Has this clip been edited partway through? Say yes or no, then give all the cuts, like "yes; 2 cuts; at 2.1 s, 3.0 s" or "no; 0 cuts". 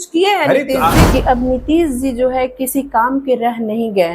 yes; 1 cut; at 1.0 s